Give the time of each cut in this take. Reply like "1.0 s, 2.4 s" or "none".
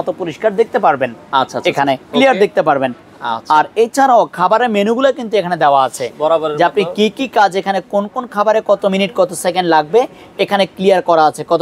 none